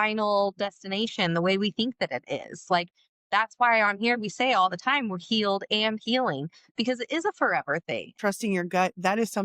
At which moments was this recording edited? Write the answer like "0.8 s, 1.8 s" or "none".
8.2 s